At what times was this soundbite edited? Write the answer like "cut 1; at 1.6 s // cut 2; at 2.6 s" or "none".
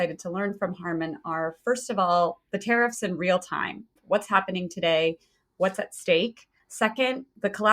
cut 1; at 4.0 s

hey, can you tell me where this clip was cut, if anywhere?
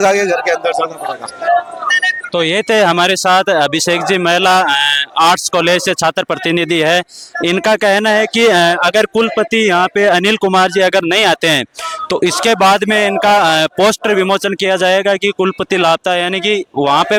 none

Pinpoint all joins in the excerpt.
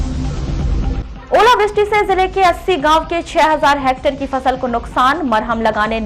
none

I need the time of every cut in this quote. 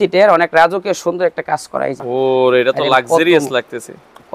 cut 1; at 2.0 s

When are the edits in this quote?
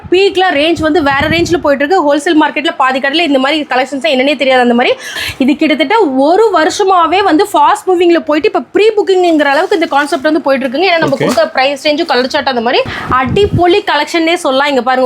cut 1; at 5.2 s // cut 2; at 13.0 s

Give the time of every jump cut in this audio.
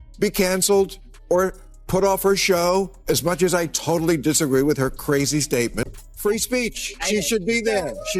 cut 1; at 5.8 s

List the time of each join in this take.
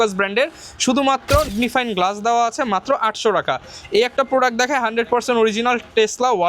cut 1; at 1.5 s

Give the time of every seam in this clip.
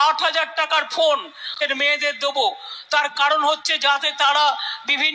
cut 1; at 1.5 s

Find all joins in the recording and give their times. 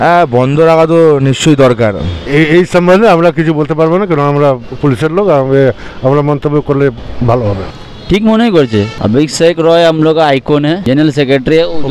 cut 1; at 2.1 s // cut 2; at 7.7 s // cut 3; at 8.9 s // cut 4; at 10.8 s

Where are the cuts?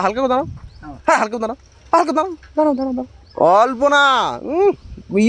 cut 1; at 3.2 s

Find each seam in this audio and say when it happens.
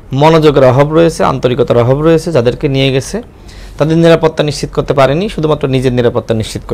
none

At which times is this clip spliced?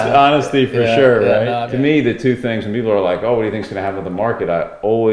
cut 1; at 1.6 s

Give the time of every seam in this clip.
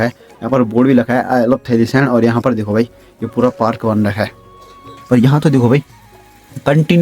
cut 1; at 4.9 s

